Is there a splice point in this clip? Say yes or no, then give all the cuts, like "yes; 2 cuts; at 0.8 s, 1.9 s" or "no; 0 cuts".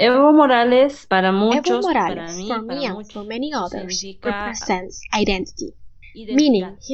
yes; 1 cut; at 1.7 s